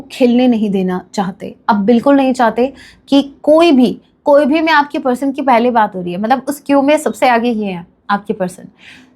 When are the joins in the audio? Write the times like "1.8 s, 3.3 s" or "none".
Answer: none